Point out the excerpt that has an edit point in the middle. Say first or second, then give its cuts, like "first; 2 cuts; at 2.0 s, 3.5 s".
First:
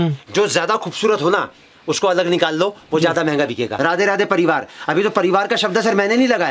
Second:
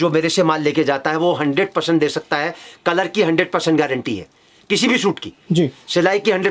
first; 1 cut; at 3.7 s